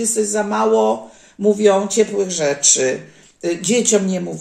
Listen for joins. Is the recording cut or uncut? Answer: uncut